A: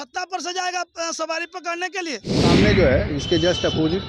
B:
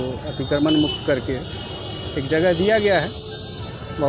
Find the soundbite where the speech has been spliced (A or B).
A